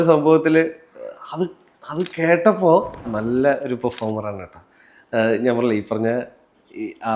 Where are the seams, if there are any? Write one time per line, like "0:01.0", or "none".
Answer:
0:03.1